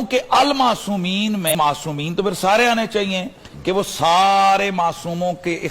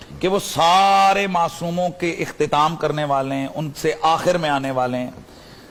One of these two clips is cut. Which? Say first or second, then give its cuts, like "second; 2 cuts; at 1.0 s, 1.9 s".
first; 1 cut; at 1.5 s